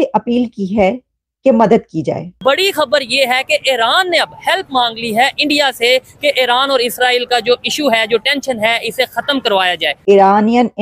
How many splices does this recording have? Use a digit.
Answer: 2